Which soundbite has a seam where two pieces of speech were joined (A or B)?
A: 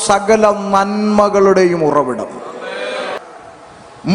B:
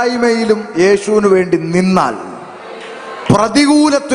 A